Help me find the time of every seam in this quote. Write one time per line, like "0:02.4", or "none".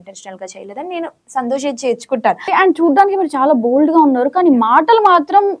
0:02.5